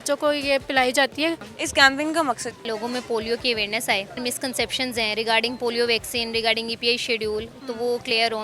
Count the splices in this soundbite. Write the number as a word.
three